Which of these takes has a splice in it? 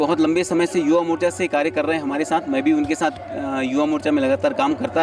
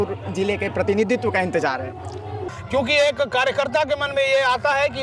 second; 1 cut; at 2.5 s

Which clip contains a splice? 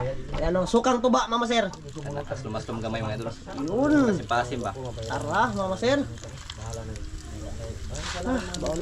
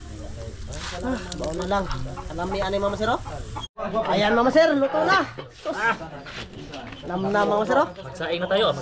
second; 1 cut; at 3.6 s

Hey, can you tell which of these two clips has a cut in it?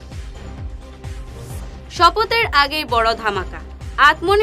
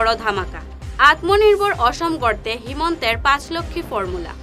first; 1 cut; at 1.3 s

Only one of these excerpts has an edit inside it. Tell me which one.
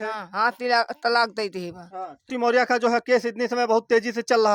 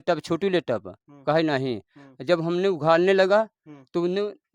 first; 1 cut; at 2.3 s

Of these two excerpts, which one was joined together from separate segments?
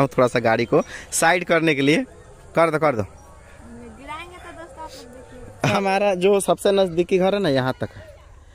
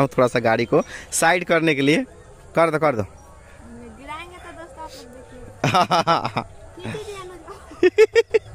first; 1 cut; at 5.7 s

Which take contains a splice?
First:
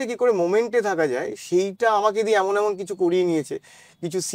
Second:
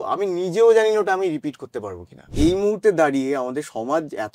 second; 1 cut; at 2.3 s

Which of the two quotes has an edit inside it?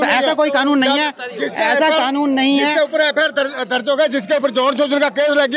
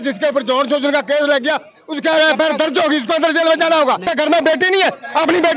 second; 1 cut; at 4.1 s

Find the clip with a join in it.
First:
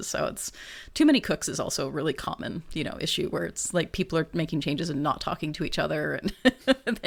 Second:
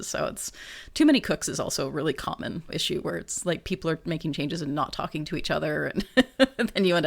second; 1 cut; at 2.7 s

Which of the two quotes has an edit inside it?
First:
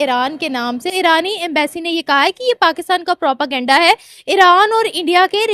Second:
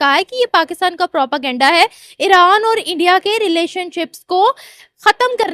first; 1 cut; at 0.9 s

